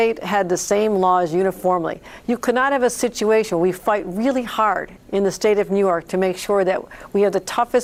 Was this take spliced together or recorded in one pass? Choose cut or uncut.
uncut